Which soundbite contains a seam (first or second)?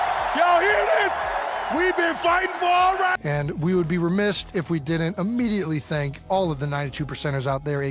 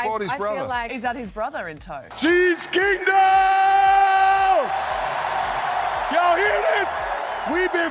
second